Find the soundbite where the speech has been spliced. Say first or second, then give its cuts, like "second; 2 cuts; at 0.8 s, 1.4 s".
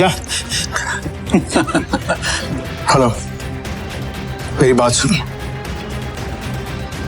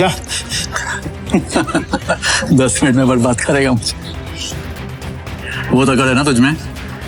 first; 2 cuts; at 2.3 s, 6.1 s